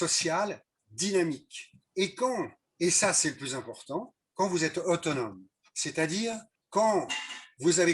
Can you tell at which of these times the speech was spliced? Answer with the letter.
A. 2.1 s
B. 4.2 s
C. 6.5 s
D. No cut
C